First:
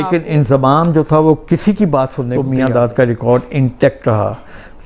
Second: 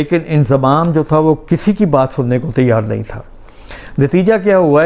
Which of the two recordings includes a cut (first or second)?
first